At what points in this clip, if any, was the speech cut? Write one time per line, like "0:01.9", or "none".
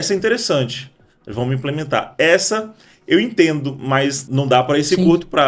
0:04.2